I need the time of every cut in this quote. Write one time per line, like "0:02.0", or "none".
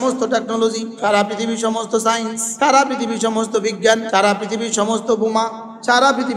0:00.9
0:02.4
0:04.0